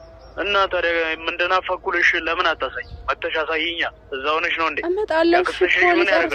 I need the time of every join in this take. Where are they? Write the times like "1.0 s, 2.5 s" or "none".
none